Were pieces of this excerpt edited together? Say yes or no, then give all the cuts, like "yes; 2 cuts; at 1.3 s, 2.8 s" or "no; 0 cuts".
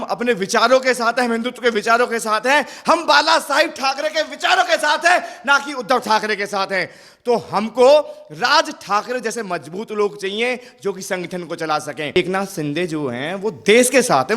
yes; 1 cut; at 12.2 s